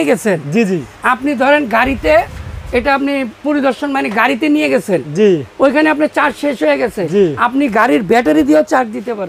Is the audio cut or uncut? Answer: uncut